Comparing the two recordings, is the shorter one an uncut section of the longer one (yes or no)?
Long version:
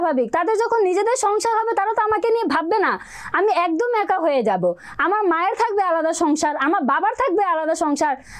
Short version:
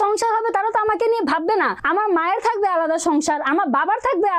no